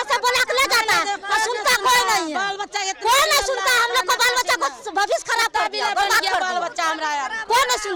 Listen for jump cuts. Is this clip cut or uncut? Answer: uncut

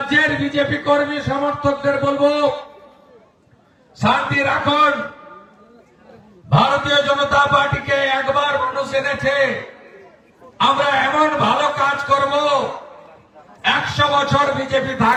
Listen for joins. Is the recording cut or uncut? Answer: uncut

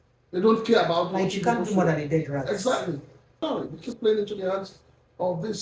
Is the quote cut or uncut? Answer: cut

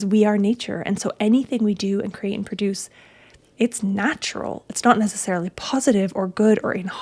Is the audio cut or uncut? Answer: uncut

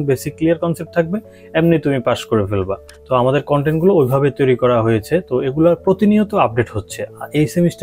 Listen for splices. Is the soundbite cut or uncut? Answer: uncut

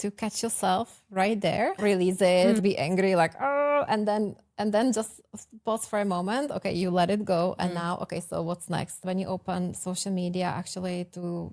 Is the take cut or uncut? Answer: cut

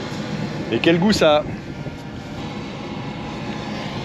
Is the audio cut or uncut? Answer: cut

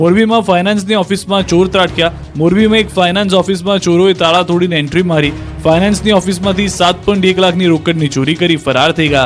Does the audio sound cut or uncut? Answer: uncut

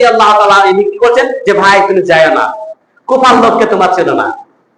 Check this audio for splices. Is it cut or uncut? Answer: uncut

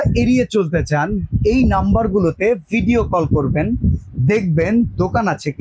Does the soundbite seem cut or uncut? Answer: uncut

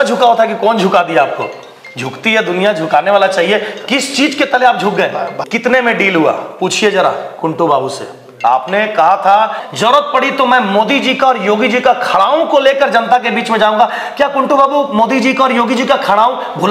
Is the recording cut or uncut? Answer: cut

